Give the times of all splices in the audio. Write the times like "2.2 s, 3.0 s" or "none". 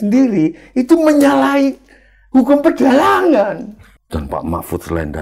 3.8 s